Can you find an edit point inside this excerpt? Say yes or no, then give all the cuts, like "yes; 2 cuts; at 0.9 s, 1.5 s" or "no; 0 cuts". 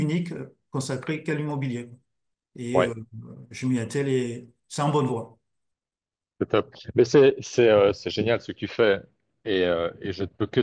no; 0 cuts